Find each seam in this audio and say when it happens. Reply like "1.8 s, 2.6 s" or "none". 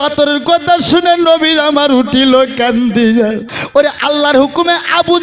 3.5 s